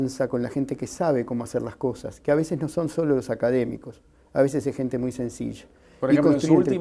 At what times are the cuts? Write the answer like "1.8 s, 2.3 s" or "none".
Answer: 1.5 s